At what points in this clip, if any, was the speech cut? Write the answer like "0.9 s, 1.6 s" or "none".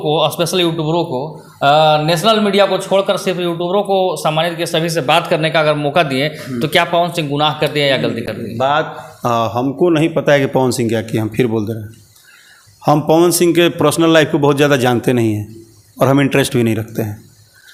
none

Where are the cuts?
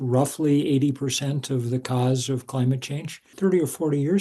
3.2 s

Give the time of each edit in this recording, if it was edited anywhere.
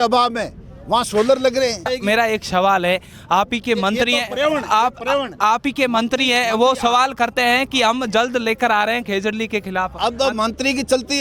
1.9 s

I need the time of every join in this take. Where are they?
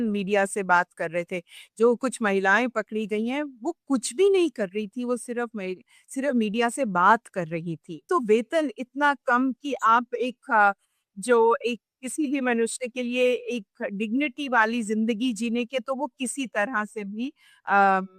8.0 s

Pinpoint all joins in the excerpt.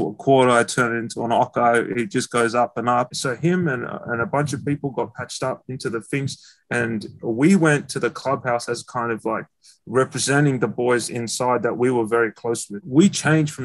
3.1 s, 12.7 s

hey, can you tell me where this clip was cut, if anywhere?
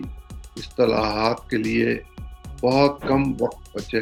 none

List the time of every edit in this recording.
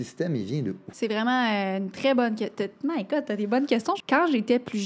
0.8 s, 4.0 s

